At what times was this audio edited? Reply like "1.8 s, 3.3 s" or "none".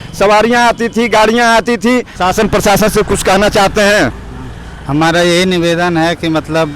2.1 s